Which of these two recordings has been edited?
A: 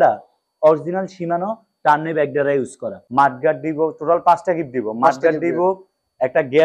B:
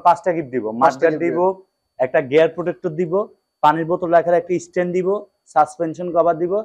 A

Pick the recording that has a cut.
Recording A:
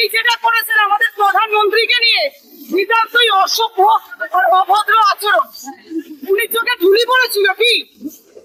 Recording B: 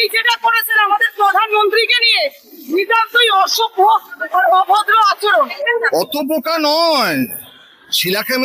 B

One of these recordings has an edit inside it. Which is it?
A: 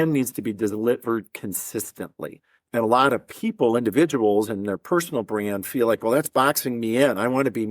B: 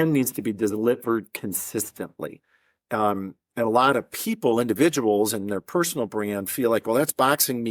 A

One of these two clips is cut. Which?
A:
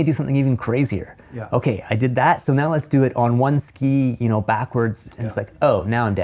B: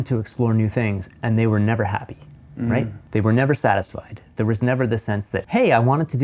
B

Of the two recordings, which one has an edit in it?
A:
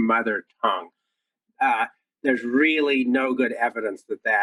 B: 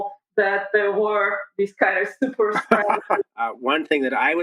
B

